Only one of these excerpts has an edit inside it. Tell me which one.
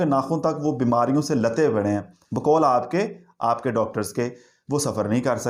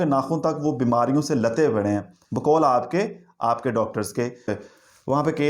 second; 1 cut; at 4.6 s

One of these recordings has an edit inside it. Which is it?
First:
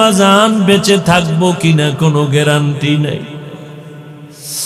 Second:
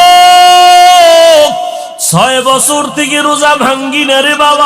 second; 1 cut; at 1.9 s

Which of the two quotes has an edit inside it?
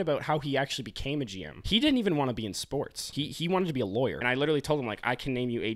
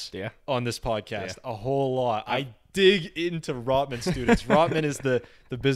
first; 3 cuts; at 1.5 s, 3.0 s, 4.2 s

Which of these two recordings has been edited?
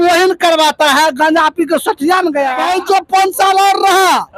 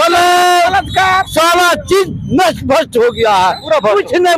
first; 1 cut; at 2.6 s

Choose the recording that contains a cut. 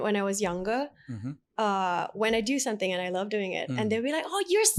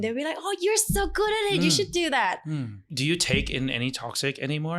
second; 1 cut; at 2.8 s

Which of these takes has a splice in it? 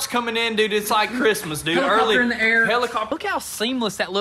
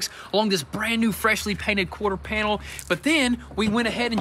first; 1 cut; at 3.1 s

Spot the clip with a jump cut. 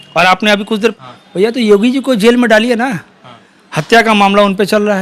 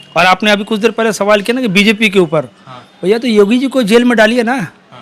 first; 1 cut; at 1.0 s

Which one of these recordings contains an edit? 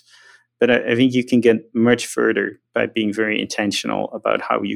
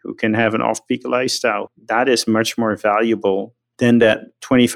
second; 2 cuts; at 1.6 s, 3.6 s

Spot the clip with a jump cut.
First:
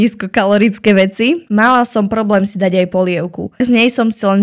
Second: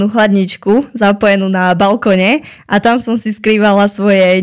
first; 2 cuts; at 1.4 s, 3.6 s

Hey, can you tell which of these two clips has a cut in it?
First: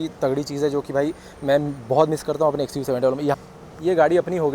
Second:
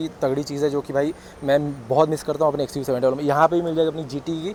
first; 1 cut; at 3.3 s

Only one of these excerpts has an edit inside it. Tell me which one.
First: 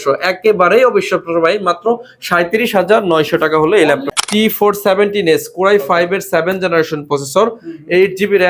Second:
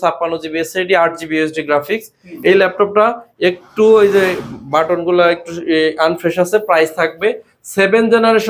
first; 1 cut; at 4.1 s

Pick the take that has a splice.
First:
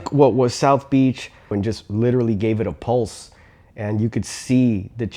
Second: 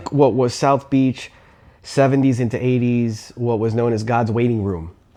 first; 1 cut; at 1.6 s

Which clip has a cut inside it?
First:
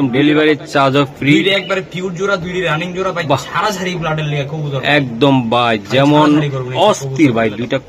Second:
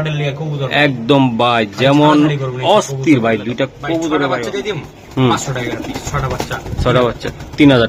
second; 1 cut; at 4.9 s

